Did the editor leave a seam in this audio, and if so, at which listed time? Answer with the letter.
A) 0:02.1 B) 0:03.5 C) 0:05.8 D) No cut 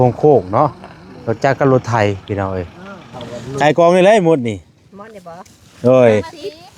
B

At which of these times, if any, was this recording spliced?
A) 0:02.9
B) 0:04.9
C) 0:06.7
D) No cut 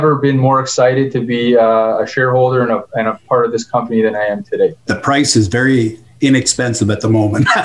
B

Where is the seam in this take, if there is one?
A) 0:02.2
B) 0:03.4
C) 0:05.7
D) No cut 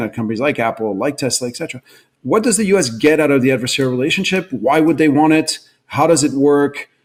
D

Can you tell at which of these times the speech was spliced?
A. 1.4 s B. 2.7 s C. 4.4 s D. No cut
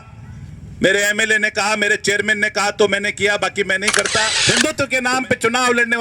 C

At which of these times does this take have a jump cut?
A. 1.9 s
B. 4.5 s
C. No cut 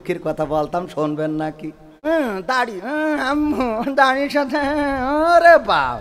A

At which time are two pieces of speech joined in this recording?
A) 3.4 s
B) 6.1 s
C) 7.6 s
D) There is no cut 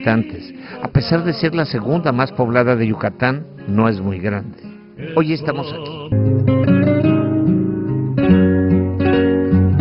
D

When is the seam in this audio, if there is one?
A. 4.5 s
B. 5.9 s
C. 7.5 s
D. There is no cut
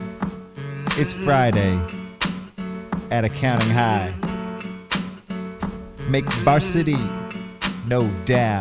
D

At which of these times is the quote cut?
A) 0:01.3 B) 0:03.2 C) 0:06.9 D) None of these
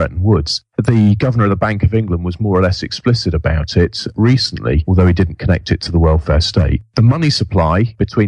A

